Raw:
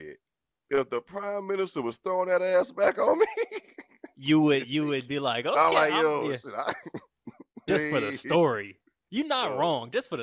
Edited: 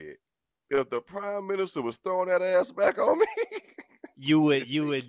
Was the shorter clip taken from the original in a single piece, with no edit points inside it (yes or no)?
yes